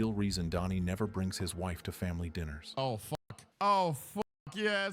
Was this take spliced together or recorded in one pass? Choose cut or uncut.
cut